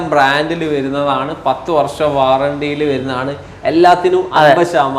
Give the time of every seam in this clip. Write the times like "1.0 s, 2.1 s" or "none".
none